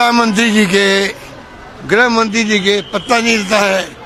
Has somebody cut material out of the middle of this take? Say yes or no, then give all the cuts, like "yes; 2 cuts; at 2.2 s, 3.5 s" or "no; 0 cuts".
no; 0 cuts